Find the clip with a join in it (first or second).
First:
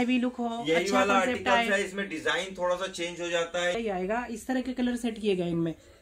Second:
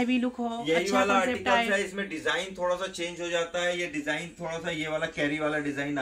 first